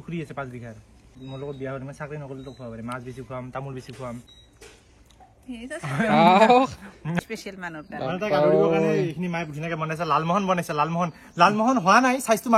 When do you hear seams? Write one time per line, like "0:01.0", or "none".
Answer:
0:01.1
0:04.4
0:07.1